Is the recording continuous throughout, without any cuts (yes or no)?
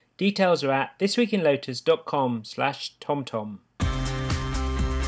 no